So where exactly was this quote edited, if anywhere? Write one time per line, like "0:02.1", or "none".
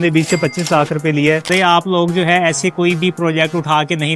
0:01.5